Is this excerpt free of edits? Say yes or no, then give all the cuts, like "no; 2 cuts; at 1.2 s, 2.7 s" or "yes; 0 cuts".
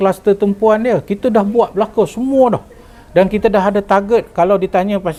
yes; 0 cuts